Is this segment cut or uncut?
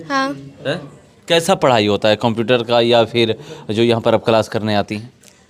uncut